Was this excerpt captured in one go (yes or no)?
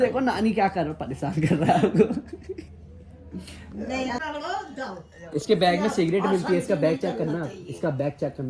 no